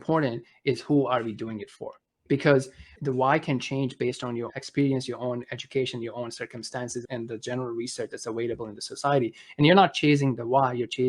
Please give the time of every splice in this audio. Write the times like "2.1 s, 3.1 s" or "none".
2.2 s, 2.9 s, 4.5 s, 7.1 s